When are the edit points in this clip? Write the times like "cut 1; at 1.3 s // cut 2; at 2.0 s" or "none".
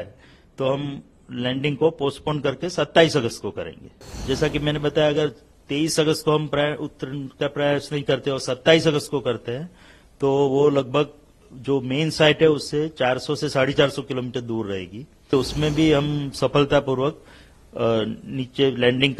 cut 1; at 4.1 s // cut 2; at 15.3 s